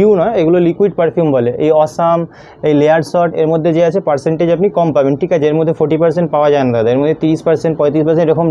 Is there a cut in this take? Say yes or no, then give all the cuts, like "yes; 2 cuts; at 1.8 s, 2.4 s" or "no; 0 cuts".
no; 0 cuts